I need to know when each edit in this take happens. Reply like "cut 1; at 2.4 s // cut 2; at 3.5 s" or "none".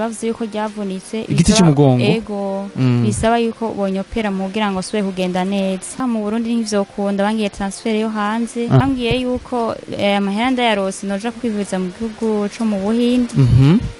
cut 1; at 6.0 s // cut 2; at 8.8 s